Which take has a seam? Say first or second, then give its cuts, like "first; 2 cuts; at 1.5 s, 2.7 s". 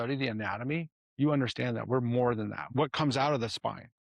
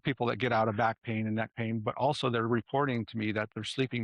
first; 2 cuts; at 1.0 s, 2.7 s